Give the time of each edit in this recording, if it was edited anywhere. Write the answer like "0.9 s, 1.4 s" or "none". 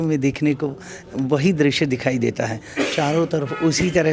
none

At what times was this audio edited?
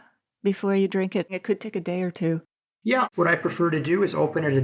1.3 s, 3.1 s

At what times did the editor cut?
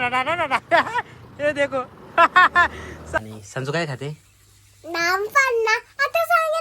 3.1 s

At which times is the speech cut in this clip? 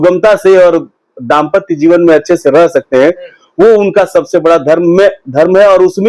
none

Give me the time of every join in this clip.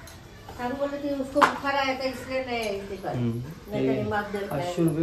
none

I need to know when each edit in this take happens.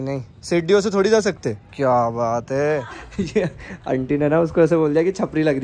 3.0 s

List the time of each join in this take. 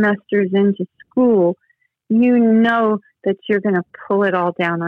none

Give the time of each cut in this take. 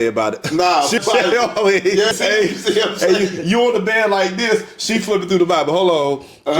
1.0 s, 2.1 s

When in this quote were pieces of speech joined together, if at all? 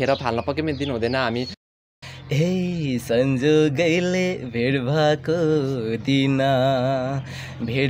1.7 s

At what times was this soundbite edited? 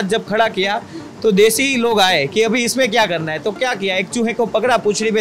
none

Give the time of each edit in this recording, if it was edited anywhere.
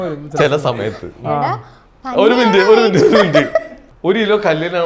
3.8 s

